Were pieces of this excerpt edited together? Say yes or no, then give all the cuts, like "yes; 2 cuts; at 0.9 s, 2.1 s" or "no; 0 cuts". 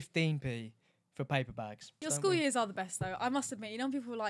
yes; 1 cut; at 2.0 s